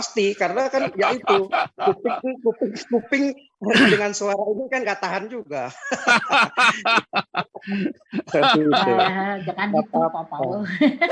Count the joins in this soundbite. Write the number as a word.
zero